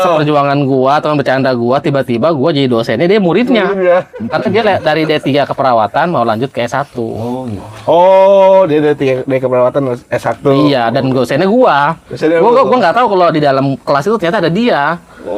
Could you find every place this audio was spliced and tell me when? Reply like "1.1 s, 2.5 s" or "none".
none